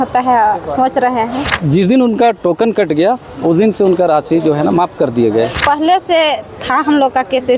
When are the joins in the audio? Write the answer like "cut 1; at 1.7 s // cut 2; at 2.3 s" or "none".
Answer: cut 1; at 1.6 s // cut 2; at 5.6 s